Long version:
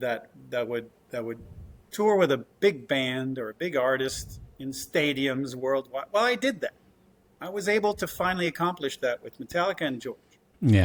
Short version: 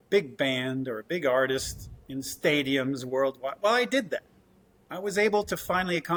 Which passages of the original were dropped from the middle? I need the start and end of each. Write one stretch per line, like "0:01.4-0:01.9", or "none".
none

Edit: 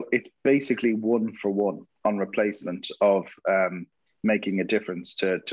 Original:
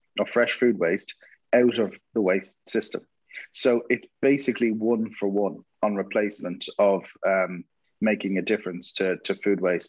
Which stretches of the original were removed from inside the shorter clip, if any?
none

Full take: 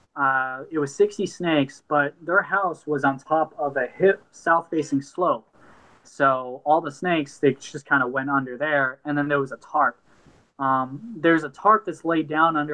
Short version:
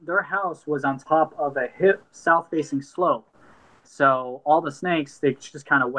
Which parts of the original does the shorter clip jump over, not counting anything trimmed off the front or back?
none

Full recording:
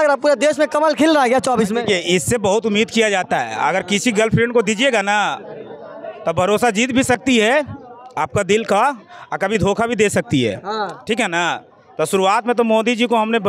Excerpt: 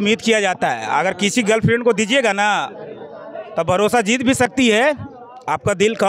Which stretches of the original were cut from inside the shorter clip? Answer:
none

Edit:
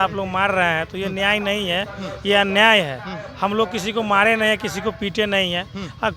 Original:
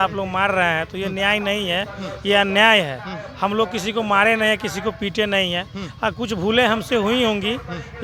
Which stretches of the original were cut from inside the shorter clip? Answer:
none

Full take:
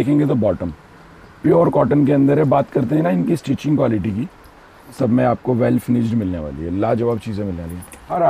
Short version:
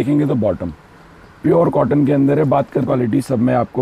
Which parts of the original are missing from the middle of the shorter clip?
0:02.9-0:04.6

